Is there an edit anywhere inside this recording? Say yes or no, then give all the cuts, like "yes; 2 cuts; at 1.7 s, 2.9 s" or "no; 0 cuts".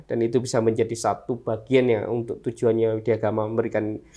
no; 0 cuts